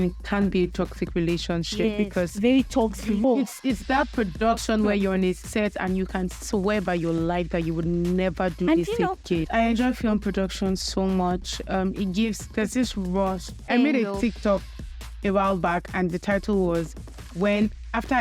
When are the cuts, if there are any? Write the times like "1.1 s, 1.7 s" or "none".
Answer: 3.2 s, 9.4 s, 13.5 s